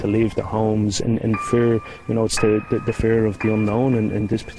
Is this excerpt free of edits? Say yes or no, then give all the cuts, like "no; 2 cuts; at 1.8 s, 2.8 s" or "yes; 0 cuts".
yes; 0 cuts